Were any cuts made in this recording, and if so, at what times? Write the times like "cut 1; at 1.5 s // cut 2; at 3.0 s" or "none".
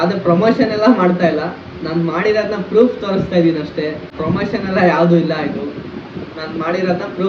none